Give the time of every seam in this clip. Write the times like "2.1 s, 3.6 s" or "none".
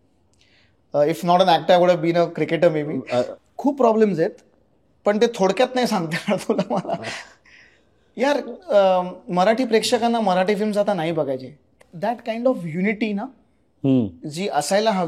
3.4 s, 11.7 s